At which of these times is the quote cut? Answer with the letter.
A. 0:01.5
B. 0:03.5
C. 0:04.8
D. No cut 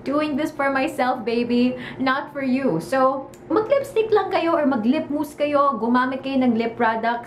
B